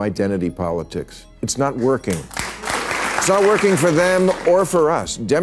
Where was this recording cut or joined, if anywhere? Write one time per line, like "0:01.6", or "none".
0:02.7